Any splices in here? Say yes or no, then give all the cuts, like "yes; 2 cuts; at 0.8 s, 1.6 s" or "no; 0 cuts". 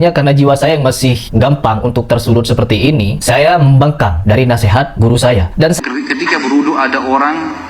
yes; 1 cut; at 5.8 s